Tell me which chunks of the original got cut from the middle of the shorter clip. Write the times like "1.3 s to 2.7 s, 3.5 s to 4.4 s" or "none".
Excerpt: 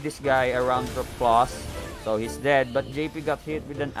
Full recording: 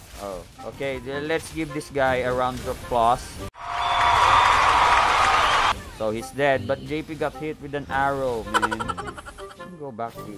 3.6 s to 5.9 s